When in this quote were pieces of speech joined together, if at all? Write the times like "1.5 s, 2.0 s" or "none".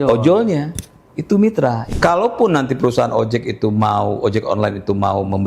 1.8 s